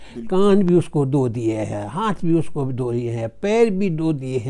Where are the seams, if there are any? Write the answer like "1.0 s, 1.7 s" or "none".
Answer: none